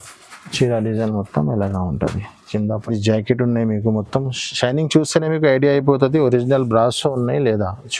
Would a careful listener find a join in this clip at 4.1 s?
no; 1 cut; at 2.8 s

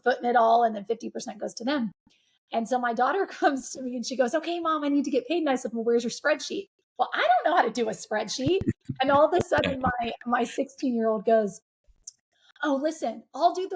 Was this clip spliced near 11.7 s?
no; 0 cuts

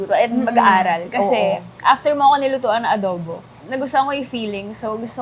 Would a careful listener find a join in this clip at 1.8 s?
no; 1 cut; at 3.6 s

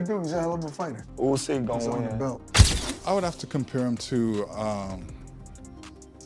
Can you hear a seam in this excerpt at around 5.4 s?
no; 1 cut; at 2.5 s

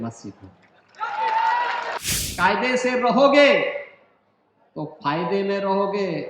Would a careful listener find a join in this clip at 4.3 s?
no; 1 cut; at 2.0 s

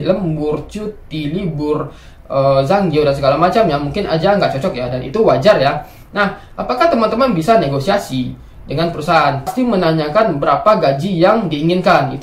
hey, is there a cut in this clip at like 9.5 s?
yes; 1 cut; at 9.5 s

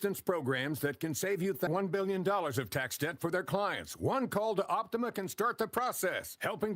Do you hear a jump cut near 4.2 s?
no; 1 cut; at 1.7 s

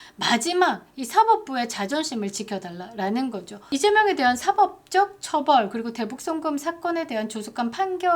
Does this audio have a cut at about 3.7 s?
yes; 1 cut; at 3.7 s

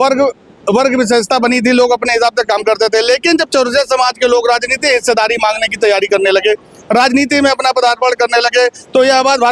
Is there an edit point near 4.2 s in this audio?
no; 0 cuts

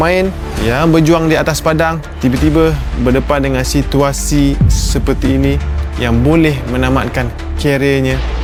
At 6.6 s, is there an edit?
no; 0 cuts

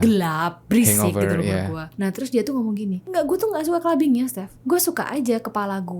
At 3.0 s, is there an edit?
yes; 2 cuts; at 3.0 s, 4.5 s

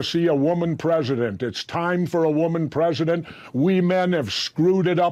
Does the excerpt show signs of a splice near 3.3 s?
no; 0 cuts

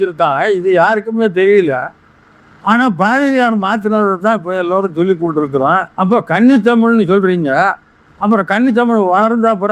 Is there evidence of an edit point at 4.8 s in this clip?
no; 1 cut; at 6.1 s

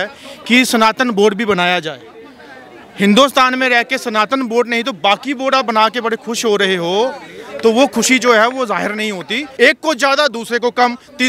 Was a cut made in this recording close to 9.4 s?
yes; 1 cut; at 9.4 s

